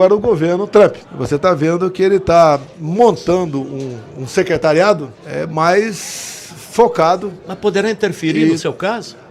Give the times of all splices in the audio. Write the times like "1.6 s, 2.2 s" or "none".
1.1 s, 5.2 s